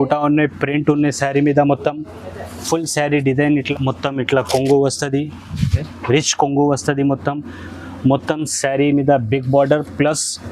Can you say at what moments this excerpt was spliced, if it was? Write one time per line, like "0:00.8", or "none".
0:03.7

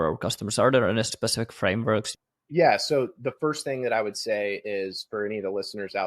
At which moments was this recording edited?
0:01.1
0:02.1

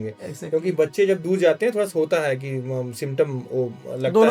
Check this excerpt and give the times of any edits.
none

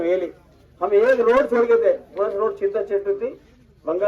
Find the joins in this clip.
none

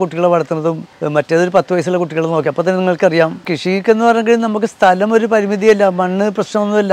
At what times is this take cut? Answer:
0:00.9
0:03.4

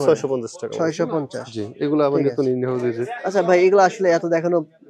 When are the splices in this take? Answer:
none

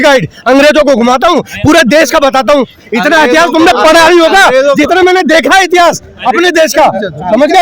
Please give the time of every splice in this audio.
none

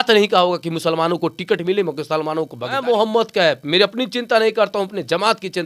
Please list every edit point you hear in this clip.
0:02.8

